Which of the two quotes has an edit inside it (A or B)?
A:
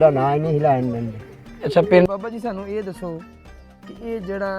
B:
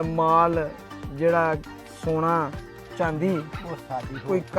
A